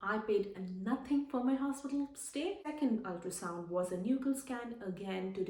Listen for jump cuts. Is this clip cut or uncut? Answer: cut